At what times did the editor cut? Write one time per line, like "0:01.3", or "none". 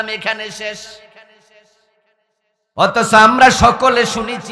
none